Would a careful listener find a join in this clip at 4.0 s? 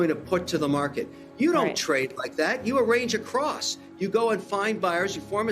no; 0 cuts

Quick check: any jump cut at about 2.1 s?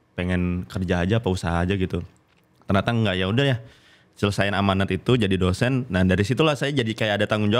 no; 0 cuts

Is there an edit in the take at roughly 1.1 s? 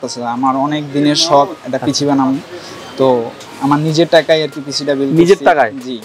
no; 0 cuts

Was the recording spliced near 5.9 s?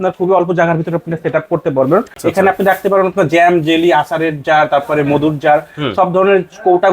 no; 1 cut; at 2.2 s

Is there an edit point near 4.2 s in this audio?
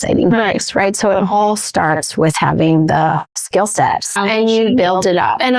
yes; 1 cut; at 4.2 s

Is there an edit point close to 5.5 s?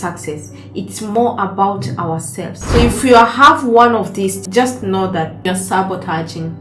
yes; 2 cuts; at 2.5 s, 5.5 s

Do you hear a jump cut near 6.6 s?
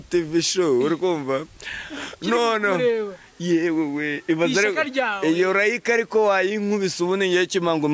no; 0 cuts

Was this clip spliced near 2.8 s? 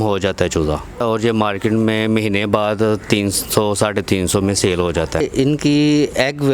no; 2 cuts; at 1.0 s, 5.3 s

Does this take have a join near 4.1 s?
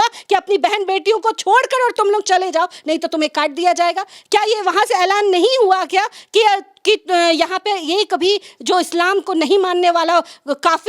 no; 0 cuts

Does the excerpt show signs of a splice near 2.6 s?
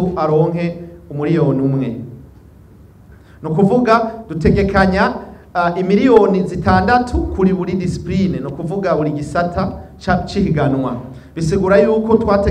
no; 0 cuts

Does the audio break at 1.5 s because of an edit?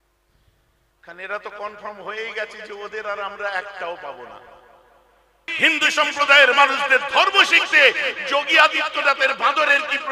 no; 1 cut; at 5.4 s

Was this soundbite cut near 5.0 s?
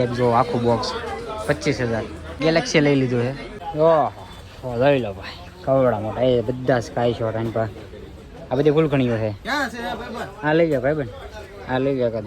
no; 2 cuts; at 2.4 s, 3.4 s

